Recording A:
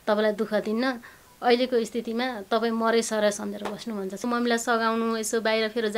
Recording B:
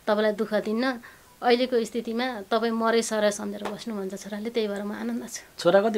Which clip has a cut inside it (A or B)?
A